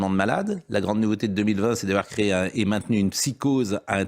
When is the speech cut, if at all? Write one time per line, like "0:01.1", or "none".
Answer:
none